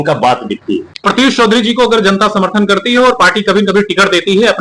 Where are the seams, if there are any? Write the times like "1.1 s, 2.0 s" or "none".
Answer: 0.9 s